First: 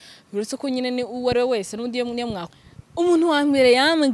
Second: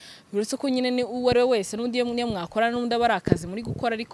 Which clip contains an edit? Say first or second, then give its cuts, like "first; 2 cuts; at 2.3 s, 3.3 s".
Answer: first; 1 cut; at 2.4 s